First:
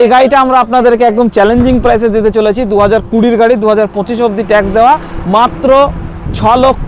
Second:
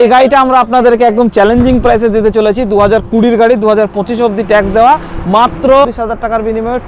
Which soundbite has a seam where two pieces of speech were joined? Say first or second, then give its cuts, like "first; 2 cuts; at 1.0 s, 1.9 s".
second; 1 cut; at 5.9 s